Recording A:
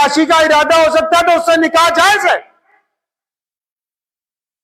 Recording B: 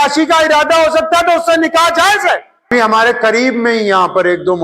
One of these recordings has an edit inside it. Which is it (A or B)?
B